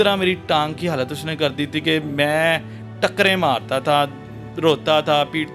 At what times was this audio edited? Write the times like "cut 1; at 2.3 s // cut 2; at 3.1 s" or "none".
none